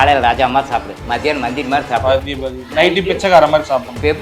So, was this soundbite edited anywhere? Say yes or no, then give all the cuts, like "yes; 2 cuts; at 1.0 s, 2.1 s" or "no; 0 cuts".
no; 0 cuts